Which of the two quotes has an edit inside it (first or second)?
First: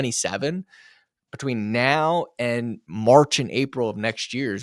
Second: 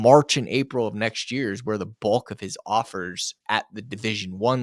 first